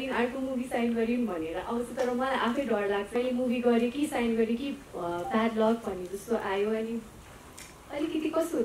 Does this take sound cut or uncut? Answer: cut